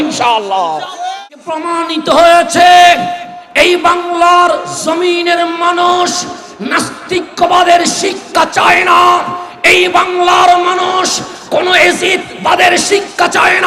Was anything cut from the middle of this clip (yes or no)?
yes